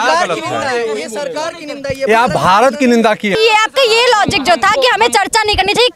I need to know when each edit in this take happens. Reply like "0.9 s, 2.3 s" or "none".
3.3 s